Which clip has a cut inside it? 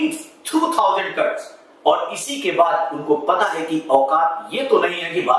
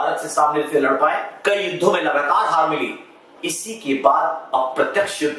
second; 1 cut; at 1.3 s

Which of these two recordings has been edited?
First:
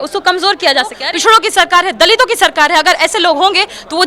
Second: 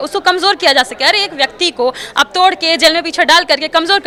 first; 1 cut; at 1.1 s

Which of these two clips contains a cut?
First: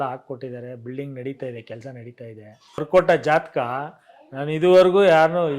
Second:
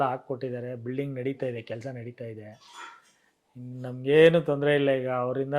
first; 1 cut; at 2.8 s

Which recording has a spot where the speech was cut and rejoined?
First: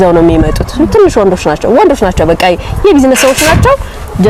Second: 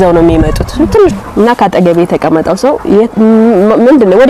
second; 1 cut; at 1.1 s

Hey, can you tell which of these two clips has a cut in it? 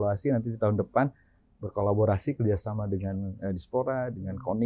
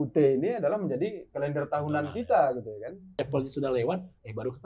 second; 1 cut; at 3.2 s

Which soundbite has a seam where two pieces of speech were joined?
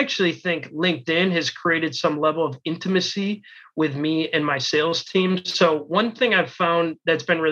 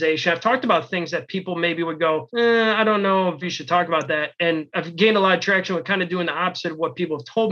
second; 3 cuts; at 2.3 s, 3.4 s, 4.7 s

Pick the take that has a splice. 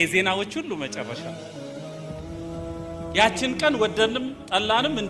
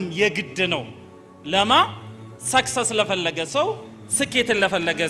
first; 2 cuts; at 1.1 s, 2.8 s

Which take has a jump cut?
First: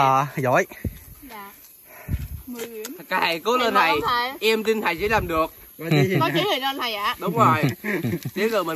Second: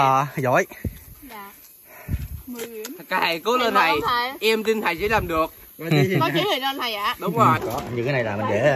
second; 1 cut; at 7.6 s

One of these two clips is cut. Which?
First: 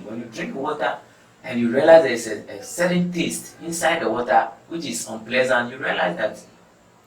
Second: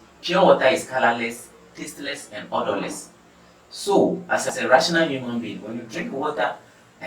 second; 1 cut; at 4.5 s

